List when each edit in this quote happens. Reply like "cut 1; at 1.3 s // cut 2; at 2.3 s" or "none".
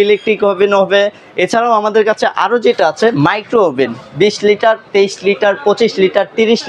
none